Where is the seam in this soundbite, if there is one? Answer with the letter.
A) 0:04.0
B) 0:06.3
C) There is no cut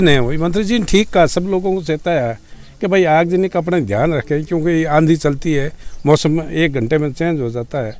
C